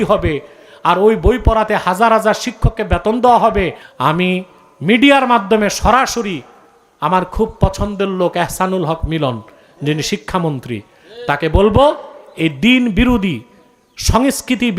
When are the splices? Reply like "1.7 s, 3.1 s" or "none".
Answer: 3.8 s